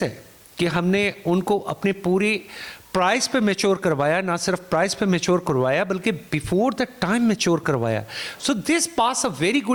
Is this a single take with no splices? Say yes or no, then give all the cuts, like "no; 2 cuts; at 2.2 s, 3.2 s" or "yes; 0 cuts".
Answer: yes; 0 cuts